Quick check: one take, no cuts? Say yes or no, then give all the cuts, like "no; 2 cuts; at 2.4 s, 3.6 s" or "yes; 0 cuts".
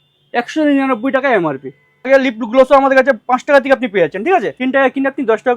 no; 2 cuts; at 2.1 s, 4.6 s